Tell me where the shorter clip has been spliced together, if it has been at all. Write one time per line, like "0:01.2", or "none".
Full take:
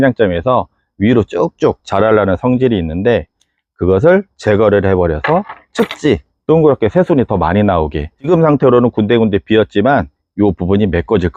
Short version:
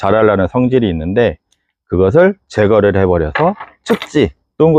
none